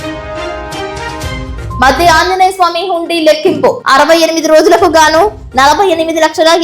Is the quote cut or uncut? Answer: cut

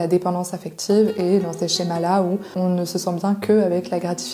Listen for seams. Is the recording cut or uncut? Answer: uncut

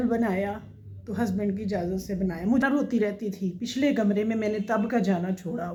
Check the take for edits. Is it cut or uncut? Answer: uncut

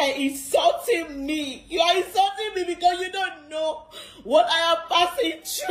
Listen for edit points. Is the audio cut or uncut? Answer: uncut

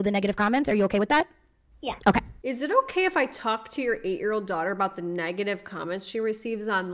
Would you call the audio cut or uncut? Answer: cut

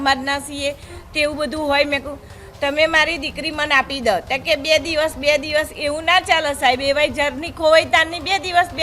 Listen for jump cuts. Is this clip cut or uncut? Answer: uncut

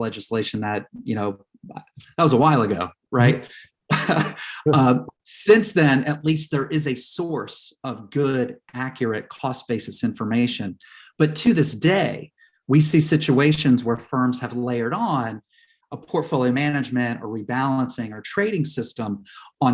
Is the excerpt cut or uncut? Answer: uncut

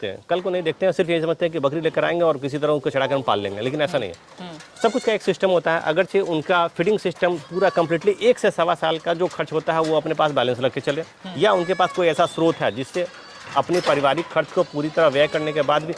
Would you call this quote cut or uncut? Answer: uncut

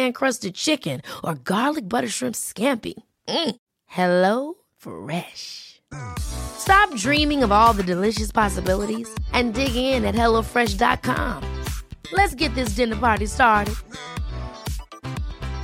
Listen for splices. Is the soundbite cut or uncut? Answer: uncut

